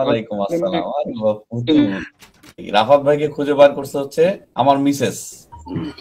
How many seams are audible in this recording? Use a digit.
2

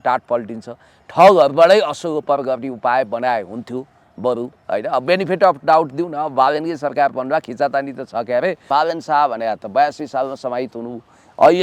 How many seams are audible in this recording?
1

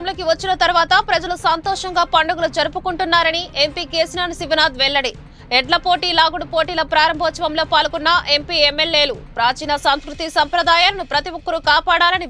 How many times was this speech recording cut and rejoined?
0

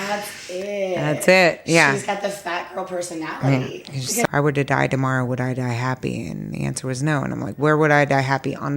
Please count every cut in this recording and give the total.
1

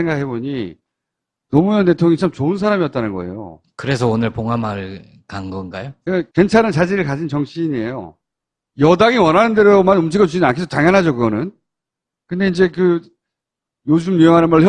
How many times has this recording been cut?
1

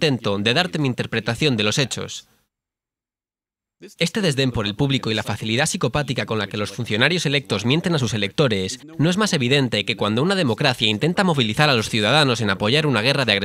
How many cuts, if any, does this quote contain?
1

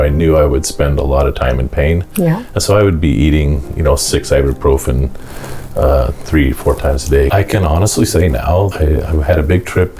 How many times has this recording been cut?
2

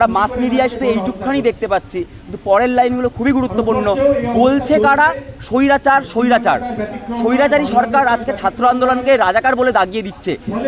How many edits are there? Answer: 0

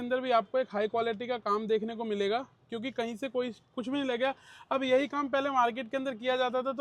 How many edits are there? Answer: 0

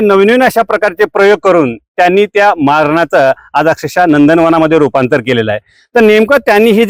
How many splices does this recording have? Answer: 0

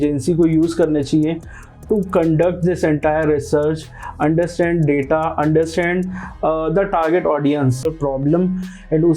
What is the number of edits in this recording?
1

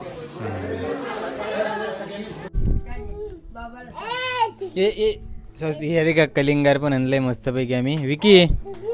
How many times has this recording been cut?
1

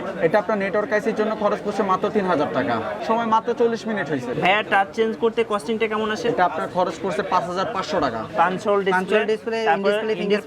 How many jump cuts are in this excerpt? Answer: 3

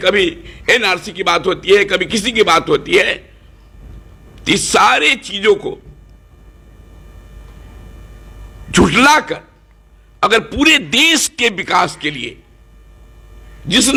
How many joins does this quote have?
0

